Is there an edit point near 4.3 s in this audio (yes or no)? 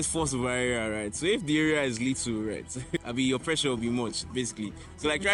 no